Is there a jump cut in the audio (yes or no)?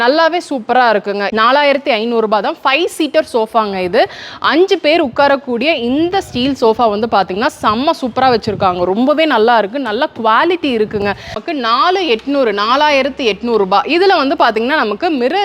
yes